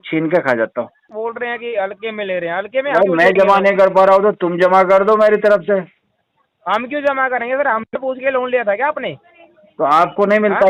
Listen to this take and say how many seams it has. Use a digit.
1